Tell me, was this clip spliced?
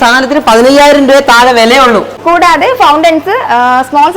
yes; 1 cut; at 2.1 s

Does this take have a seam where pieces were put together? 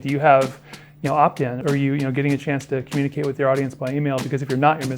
yes; 1 cut; at 1.6 s

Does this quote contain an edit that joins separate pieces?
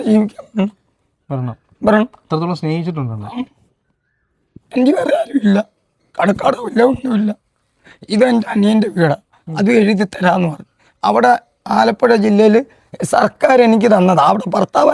no; 0 cuts

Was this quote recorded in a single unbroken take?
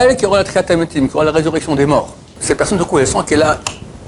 no; 1 cut; at 2.3 s

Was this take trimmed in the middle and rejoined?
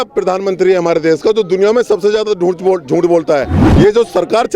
yes; 1 cut; at 3.6 s

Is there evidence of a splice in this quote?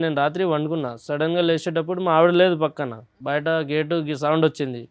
yes; 1 cut; at 3.2 s

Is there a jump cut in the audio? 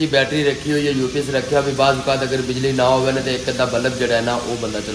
no; 0 cuts

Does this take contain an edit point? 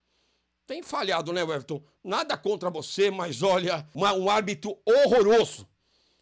yes; 1 cut; at 3.9 s

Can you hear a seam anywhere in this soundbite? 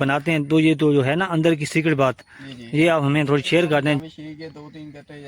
yes; 1 cut; at 4.0 s

